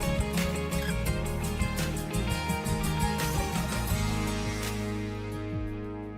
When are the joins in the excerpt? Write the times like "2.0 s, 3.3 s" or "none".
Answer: none